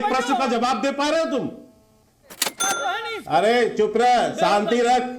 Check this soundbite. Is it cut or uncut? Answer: cut